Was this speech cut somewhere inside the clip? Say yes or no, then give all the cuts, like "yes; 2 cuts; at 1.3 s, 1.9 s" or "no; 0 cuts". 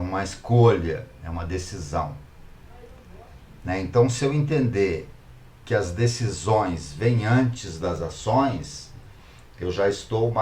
no; 0 cuts